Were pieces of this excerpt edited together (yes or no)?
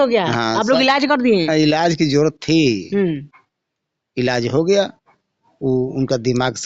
no